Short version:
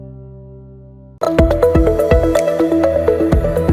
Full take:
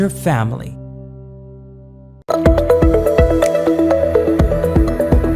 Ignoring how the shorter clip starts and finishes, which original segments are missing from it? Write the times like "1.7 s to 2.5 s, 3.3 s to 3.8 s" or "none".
2.1 s to 2.2 s